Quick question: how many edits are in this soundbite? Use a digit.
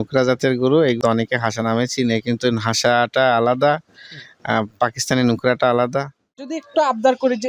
2